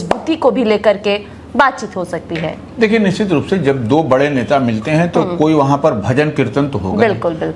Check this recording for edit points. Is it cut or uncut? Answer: uncut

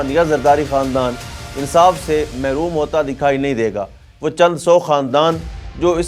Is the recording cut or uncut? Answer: uncut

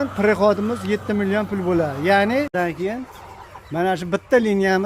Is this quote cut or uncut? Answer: cut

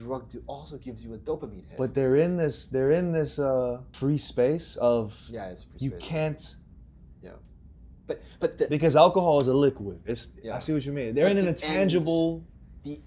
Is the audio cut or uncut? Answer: cut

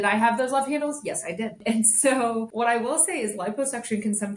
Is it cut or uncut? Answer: cut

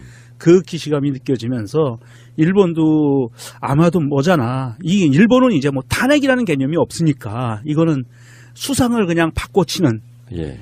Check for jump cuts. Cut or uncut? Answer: cut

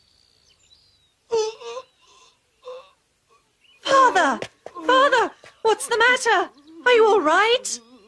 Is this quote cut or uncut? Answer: cut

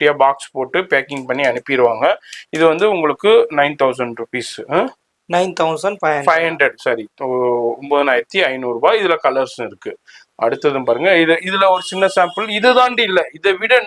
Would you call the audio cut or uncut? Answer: uncut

